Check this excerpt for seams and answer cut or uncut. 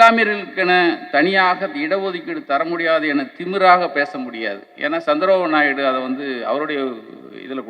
uncut